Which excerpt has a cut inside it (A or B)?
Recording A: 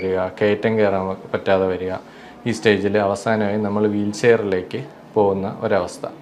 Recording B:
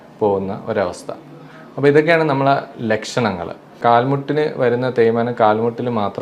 B